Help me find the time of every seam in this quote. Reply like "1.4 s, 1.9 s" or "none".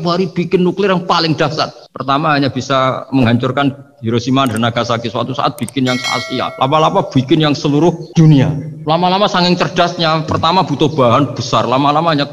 6.5 s, 8.0 s, 8.7 s

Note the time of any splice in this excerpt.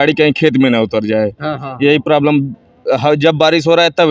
none

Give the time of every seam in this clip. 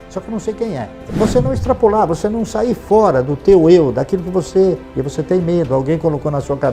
1.1 s, 4.8 s

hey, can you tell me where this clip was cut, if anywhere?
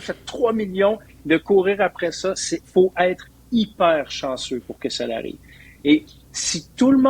none

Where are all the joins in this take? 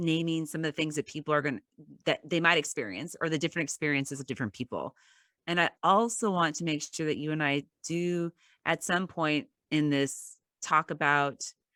none

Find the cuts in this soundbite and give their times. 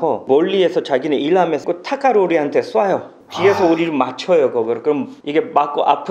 1.6 s

